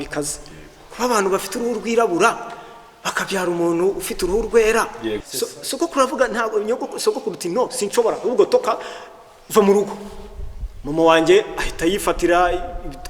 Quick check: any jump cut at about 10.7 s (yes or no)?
no